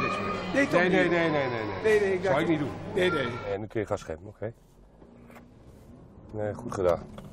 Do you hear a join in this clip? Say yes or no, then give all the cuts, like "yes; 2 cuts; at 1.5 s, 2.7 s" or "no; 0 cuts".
yes; 1 cut; at 3.5 s